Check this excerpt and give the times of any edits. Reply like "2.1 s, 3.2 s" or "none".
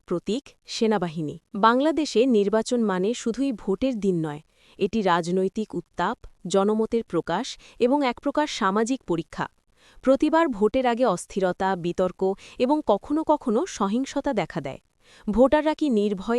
1.4 s